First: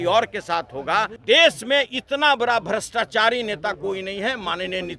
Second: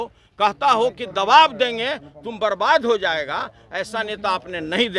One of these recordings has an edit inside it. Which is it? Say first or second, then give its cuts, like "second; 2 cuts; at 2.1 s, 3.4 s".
first; 1 cut; at 1.1 s